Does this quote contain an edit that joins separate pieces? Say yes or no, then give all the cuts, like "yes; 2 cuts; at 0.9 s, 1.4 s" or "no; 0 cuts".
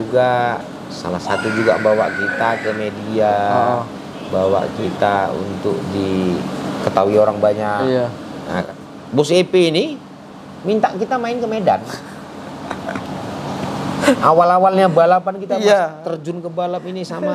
yes; 1 cut; at 8.6 s